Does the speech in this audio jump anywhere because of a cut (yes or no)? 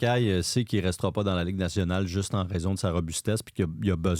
no